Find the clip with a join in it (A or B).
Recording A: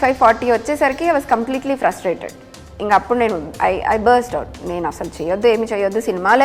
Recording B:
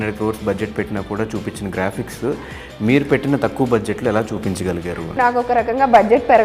B